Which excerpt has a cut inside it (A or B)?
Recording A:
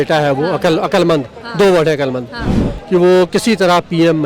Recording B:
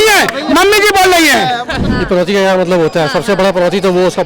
B